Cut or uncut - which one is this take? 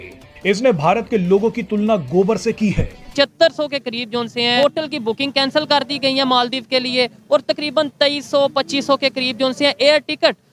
cut